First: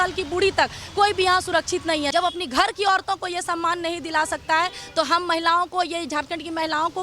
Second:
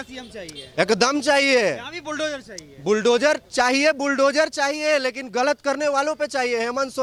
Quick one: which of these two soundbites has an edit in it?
first; 1 cut; at 2.1 s

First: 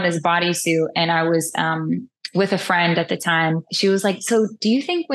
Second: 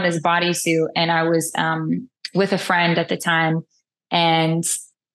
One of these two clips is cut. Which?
first; 1 cut; at 3.7 s

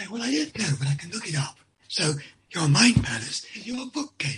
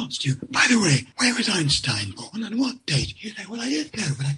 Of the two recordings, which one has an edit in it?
second; 1 cut; at 1.1 s

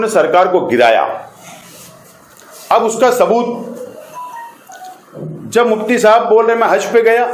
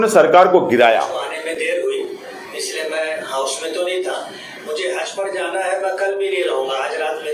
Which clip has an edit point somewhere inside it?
second; 1 cut; at 1.1 s

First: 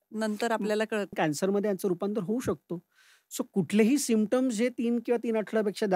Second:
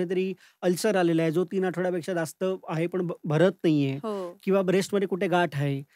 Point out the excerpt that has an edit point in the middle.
first; 1 cut; at 1.1 s

